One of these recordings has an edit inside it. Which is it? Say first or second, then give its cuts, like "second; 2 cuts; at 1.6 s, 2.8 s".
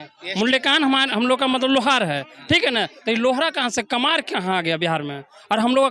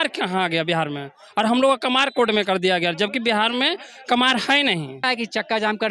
second; 1 cut; at 5.0 s